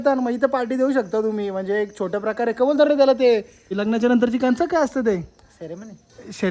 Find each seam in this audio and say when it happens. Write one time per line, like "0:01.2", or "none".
0:03.8